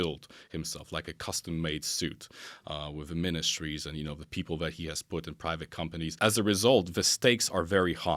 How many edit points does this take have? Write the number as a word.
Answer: one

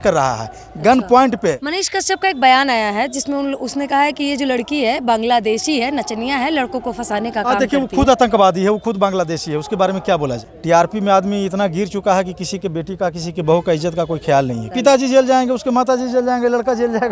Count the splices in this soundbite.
three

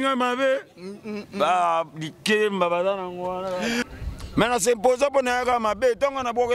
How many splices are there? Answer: one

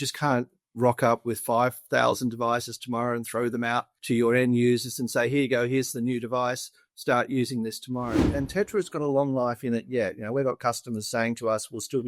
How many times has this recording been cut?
one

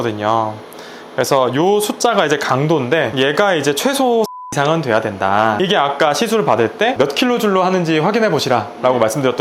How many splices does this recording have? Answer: two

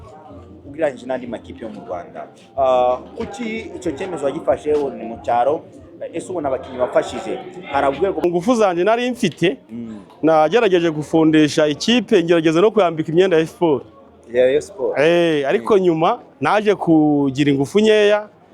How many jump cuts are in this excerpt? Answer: one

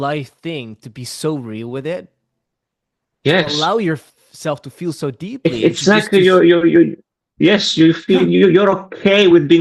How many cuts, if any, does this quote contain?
zero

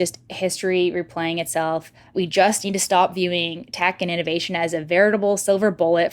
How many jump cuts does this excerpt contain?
one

